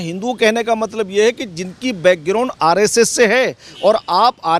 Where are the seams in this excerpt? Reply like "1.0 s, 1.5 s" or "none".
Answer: none